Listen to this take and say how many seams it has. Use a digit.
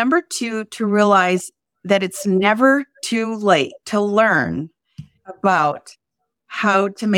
1